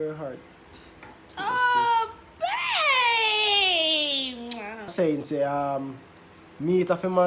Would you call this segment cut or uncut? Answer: cut